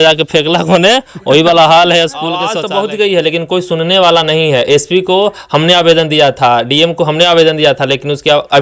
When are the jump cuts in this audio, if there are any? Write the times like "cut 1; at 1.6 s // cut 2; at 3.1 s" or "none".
cut 1; at 2.6 s